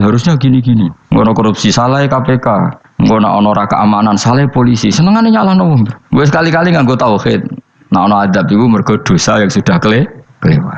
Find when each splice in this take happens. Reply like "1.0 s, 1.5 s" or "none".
1.0 s, 2.8 s